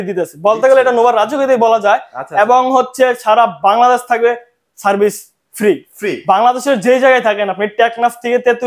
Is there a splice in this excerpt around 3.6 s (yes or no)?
no